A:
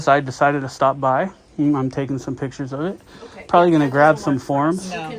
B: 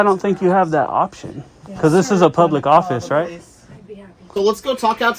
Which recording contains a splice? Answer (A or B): B